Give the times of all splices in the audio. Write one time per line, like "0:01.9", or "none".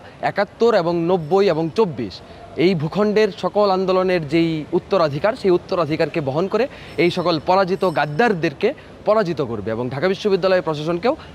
none